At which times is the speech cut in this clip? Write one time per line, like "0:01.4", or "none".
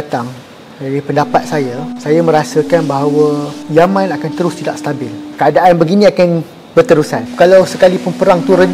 0:01.9
0:03.6
0:05.2
0:07.2